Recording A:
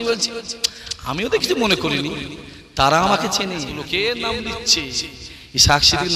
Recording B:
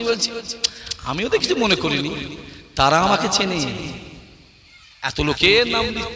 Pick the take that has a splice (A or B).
A